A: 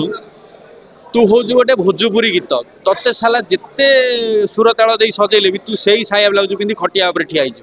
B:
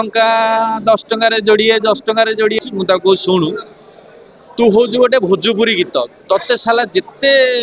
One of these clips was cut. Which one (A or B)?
B